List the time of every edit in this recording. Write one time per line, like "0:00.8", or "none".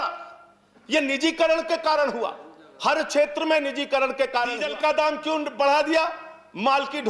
0:04.6